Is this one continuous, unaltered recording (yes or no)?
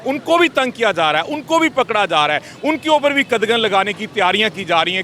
yes